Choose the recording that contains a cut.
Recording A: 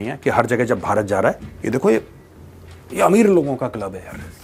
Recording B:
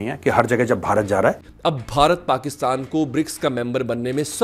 B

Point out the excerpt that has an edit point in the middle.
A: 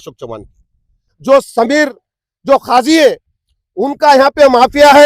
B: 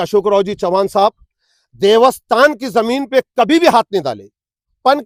A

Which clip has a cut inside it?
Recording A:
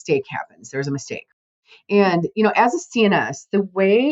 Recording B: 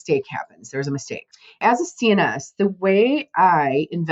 B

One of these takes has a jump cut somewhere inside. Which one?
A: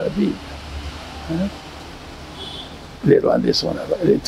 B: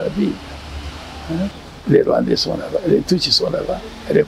B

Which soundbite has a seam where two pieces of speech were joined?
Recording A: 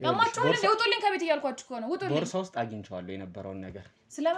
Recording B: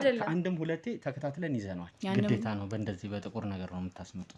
B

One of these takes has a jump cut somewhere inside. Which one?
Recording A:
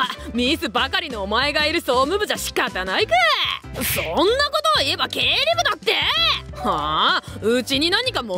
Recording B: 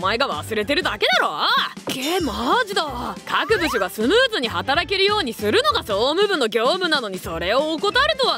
B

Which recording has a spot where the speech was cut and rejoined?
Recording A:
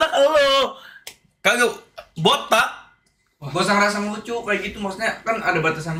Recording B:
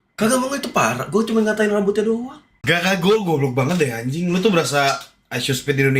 B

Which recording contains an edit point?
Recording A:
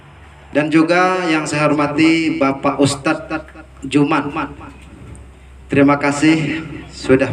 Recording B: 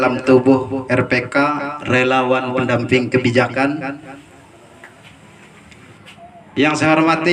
B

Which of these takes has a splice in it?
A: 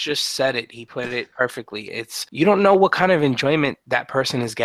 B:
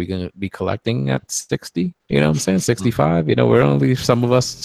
A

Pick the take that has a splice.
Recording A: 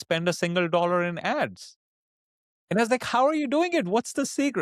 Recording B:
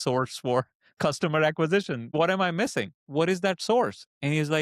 B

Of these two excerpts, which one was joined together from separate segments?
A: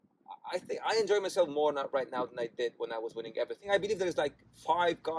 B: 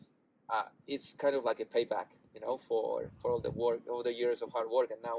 A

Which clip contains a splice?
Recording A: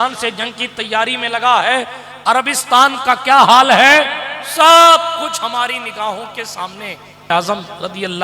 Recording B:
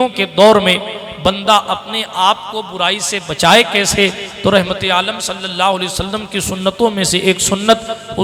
A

